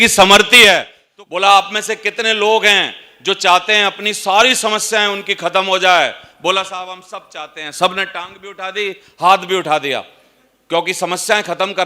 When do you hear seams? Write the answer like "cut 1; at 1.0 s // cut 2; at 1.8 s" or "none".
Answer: cut 1; at 1.0 s

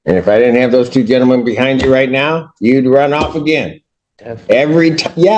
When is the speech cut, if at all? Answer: none

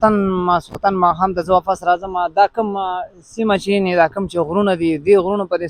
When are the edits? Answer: none

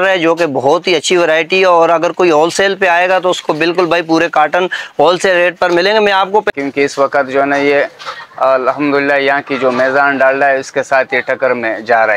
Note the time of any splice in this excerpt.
cut 1; at 6.5 s

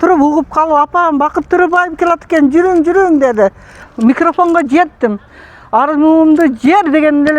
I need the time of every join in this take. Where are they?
cut 1; at 3.9 s

